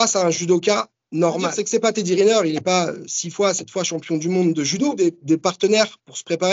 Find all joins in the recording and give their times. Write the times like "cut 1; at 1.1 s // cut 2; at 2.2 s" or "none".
cut 1; at 1.5 s // cut 2; at 4.9 s